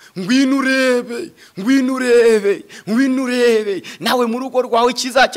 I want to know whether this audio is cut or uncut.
uncut